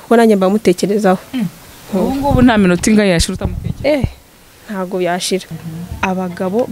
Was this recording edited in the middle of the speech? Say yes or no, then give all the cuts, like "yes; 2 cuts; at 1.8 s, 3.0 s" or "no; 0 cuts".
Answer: yes; 1 cut; at 5.6 s